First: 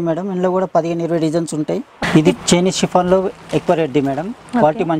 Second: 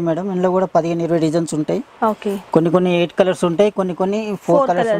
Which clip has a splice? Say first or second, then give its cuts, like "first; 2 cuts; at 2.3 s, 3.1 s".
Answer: first; 1 cut; at 1.9 s